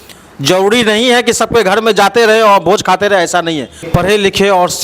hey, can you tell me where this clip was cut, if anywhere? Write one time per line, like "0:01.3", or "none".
0:03.8